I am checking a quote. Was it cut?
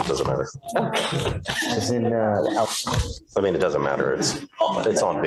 no; 0 cuts

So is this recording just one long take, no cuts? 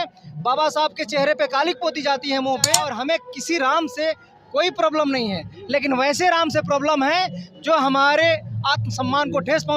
no; 1 cut; at 2.9 s

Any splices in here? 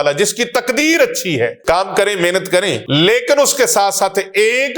yes; 2 cuts; at 1.6 s, 2.8 s

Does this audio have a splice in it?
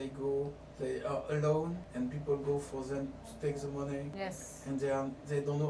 yes; 2 cuts; at 1.8 s, 4.1 s

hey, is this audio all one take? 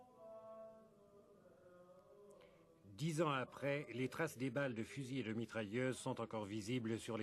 no; 1 cut; at 2.1 s

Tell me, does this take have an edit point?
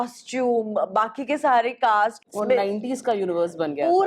yes; 1 cut; at 2.2 s

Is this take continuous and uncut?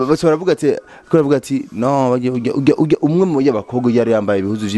yes; 0 cuts

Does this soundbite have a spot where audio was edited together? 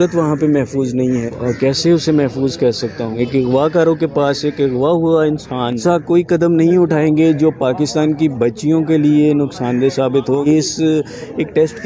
yes; 4 cuts; at 1.3 s, 3.1 s, 5.8 s, 10.5 s

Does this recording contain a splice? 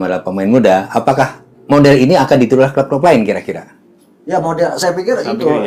no; 0 cuts

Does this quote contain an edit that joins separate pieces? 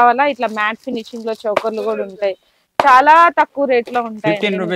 no; 0 cuts

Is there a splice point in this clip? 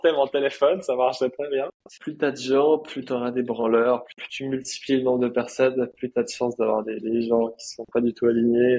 yes; 2 cuts; at 1.9 s, 4.2 s

